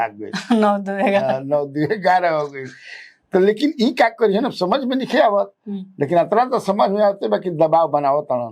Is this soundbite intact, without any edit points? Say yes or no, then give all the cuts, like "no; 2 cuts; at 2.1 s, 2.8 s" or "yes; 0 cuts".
yes; 0 cuts